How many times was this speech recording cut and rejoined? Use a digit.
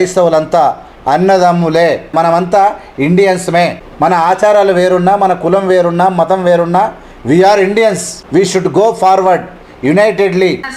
3